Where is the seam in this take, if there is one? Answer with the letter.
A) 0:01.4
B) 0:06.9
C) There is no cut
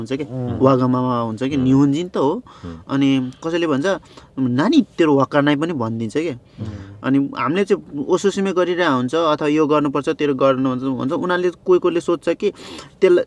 C